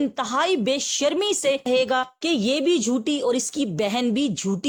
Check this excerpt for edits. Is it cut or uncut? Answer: uncut